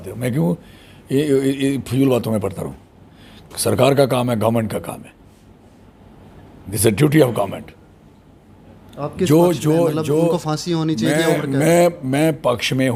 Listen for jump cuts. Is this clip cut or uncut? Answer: uncut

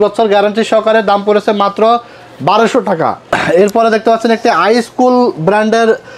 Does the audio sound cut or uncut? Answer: uncut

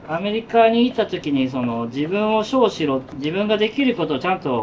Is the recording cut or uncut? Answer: cut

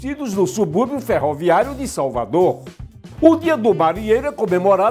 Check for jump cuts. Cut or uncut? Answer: cut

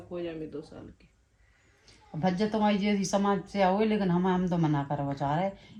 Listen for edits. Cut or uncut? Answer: uncut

